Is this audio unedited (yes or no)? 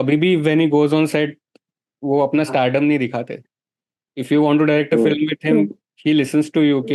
yes